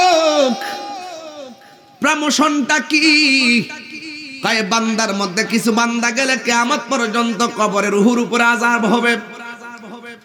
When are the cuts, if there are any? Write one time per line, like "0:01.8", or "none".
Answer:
none